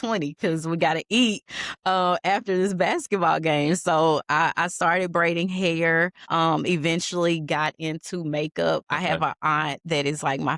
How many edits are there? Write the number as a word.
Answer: one